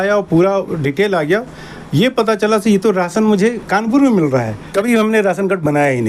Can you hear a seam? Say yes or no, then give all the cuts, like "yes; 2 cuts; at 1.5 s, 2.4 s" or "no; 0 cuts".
yes; 1 cut; at 4.6 s